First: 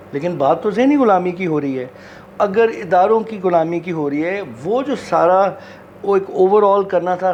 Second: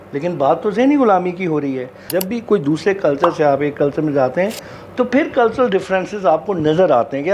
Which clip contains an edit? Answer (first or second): second